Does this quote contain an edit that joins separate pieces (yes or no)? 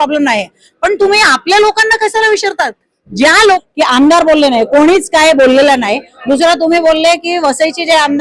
yes